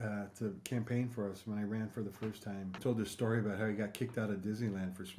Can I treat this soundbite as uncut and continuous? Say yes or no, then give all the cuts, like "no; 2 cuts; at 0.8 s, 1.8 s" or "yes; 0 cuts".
no; 1 cut; at 2.8 s